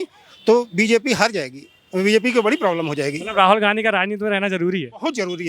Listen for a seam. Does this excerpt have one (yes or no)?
no